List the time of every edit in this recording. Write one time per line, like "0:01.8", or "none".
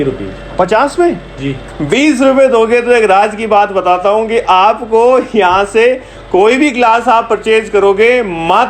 0:01.7

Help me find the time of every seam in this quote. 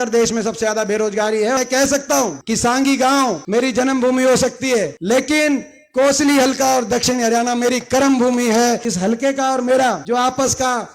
0:01.6
0:02.4
0:03.4
0:04.9
0:08.9
0:10.0

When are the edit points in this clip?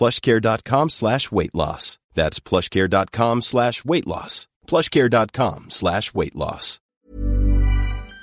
0:07.0

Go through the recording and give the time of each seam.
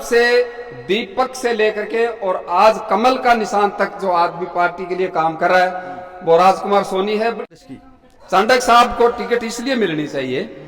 0:07.4

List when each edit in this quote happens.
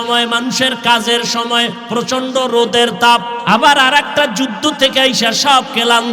0:03.3

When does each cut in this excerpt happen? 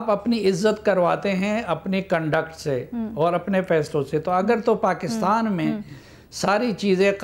none

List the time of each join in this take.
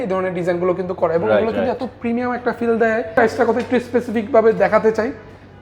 0:03.1

